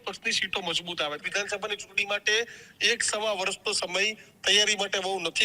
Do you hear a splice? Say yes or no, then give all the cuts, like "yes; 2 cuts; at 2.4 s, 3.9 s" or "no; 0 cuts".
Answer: yes; 1 cut; at 1.2 s